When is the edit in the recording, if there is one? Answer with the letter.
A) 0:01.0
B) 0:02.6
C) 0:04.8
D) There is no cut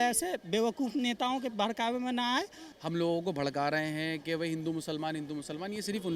B